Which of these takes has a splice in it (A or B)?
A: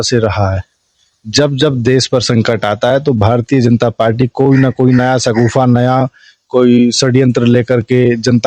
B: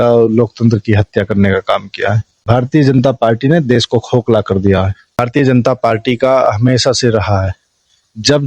B